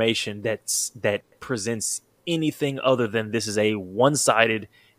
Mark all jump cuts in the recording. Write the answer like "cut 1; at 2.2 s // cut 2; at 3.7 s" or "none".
cut 1; at 2.2 s